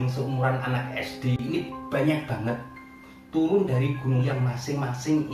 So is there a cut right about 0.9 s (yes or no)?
no